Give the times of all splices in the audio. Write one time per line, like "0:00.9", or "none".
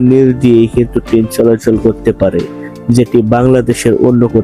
none